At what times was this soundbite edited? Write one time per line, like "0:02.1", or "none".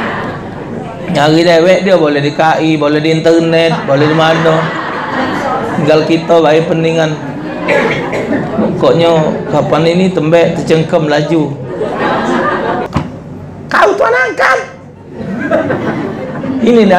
0:12.9